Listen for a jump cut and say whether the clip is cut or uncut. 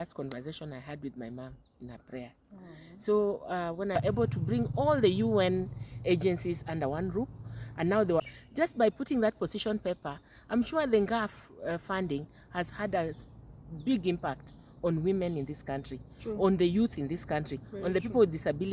cut